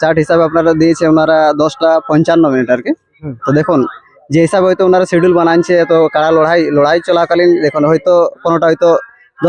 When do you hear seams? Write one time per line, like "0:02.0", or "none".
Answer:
none

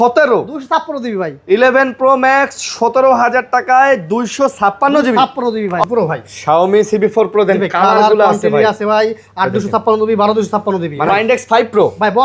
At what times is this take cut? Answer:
0:05.8
0:11.1

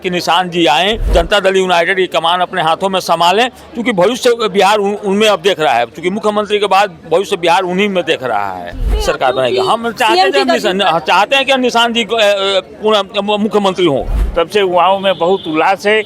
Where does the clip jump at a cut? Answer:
0:01.1
0:08.9
0:14.2

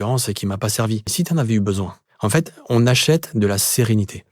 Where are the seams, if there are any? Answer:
0:01.1
0:02.0

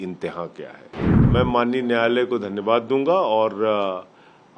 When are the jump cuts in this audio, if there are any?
0:01.0

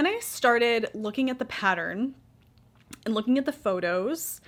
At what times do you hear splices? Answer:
none

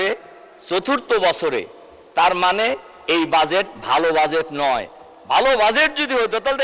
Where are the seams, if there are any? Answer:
none

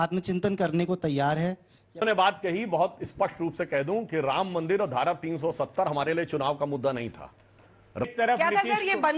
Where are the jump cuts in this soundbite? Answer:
0:02.0
0:08.1

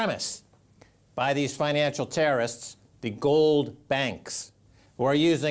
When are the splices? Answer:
0:02.0

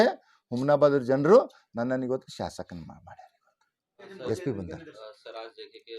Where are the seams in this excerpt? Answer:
0:04.1

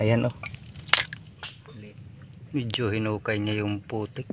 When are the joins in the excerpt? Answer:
0:01.5

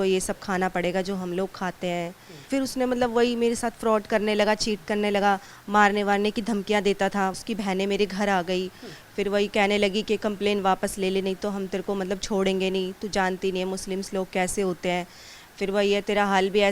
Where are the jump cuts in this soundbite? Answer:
0:02.4
0:05.5
0:07.4

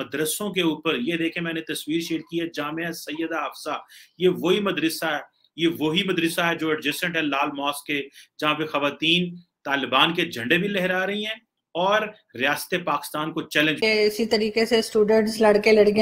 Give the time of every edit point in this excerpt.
0:13.8

